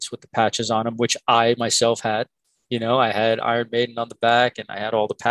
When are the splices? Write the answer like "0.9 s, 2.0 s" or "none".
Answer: none